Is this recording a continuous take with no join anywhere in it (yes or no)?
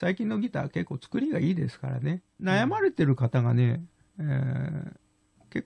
no